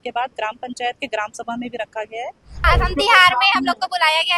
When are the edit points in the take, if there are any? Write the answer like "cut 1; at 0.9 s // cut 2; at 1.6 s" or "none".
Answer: cut 1; at 2.7 s